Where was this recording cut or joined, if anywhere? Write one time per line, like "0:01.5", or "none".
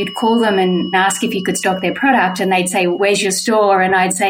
0:00.9
0:03.0